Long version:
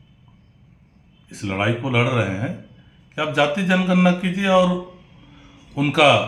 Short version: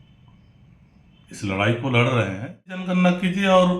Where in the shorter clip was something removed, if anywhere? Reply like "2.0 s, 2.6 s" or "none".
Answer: 2.8 s